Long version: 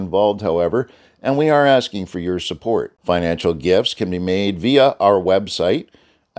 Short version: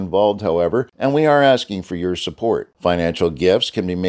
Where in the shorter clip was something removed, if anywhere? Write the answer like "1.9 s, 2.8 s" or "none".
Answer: 0.9 s